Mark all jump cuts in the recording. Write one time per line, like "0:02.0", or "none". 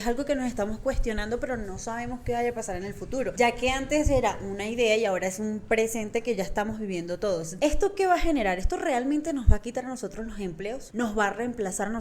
0:03.3
0:07.5
0:10.8